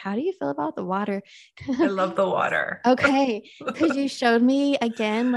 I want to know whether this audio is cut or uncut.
cut